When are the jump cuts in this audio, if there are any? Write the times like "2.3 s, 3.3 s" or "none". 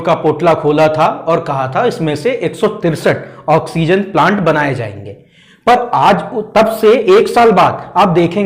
none